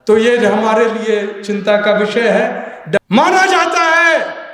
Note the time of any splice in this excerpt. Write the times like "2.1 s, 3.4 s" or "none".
3.0 s